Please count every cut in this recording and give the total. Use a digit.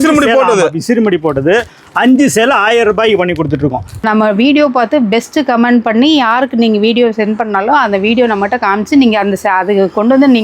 1